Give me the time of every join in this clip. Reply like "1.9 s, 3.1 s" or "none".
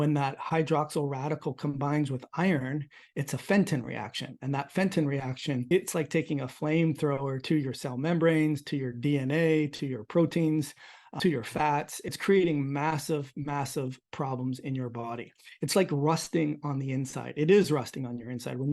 5.7 s, 11.1 s, 12.2 s

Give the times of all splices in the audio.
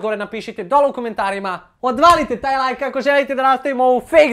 1.6 s

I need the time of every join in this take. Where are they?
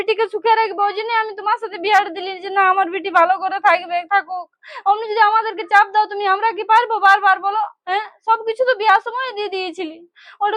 none

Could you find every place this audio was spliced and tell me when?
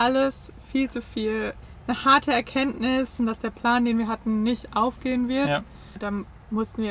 1.6 s, 3.1 s, 6.0 s

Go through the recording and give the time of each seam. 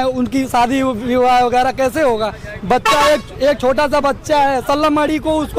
none

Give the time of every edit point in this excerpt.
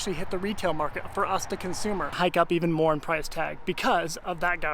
2.1 s

